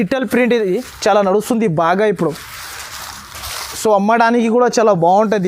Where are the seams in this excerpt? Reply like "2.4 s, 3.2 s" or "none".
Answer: none

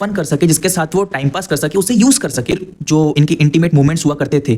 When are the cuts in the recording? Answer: 2.5 s

